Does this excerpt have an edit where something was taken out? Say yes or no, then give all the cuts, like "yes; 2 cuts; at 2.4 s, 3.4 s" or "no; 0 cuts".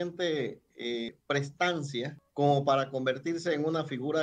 yes; 2 cuts; at 1.1 s, 2.2 s